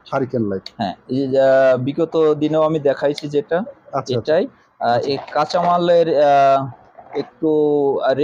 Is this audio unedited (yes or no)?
yes